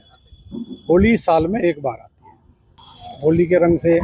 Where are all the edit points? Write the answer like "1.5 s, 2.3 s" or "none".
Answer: 2.8 s